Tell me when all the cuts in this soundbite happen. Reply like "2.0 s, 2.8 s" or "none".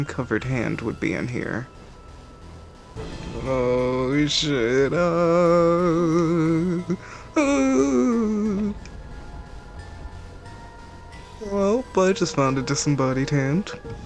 none